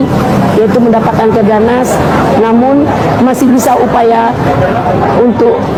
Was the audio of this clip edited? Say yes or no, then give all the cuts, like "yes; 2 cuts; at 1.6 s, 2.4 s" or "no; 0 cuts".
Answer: no; 0 cuts